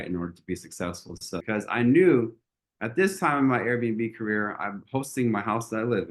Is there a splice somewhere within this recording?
yes; 1 cut; at 1.4 s

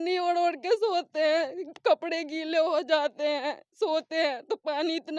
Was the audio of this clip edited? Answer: no; 0 cuts

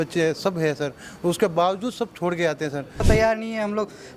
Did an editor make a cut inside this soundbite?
yes; 1 cut; at 3.0 s

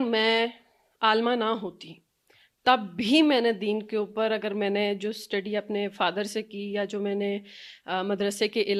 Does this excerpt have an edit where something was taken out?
no; 0 cuts

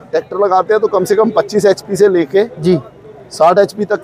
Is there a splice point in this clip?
no; 0 cuts

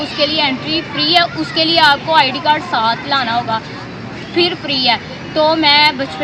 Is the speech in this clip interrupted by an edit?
no; 0 cuts

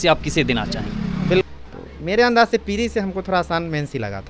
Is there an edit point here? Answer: yes; 1 cut; at 1.4 s

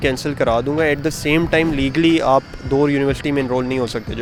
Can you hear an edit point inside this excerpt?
no; 0 cuts

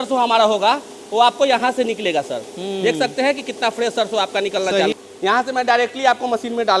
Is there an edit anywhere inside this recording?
yes; 1 cut; at 4.9 s

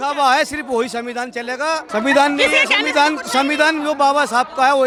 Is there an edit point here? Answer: no; 0 cuts

